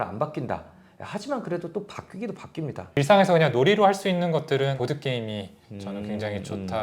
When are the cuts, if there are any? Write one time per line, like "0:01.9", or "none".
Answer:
0:03.0
0:04.8